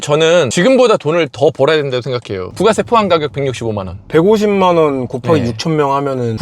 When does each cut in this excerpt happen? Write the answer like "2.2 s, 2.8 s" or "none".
2.5 s